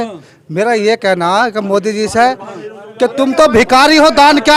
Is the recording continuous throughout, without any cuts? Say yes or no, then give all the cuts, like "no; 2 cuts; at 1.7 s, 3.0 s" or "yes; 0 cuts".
yes; 0 cuts